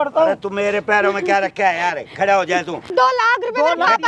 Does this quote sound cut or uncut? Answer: cut